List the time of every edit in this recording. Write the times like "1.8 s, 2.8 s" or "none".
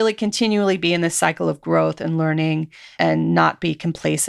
2.9 s